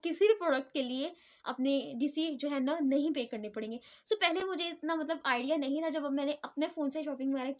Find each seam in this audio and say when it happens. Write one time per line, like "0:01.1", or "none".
none